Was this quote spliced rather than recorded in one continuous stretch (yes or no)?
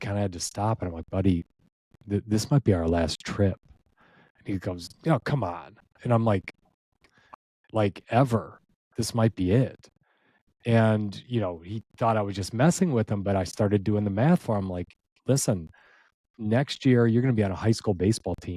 no